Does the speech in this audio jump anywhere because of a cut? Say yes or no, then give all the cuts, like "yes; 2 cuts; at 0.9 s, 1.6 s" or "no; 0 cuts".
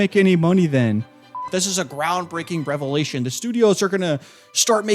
yes; 1 cut; at 1.4 s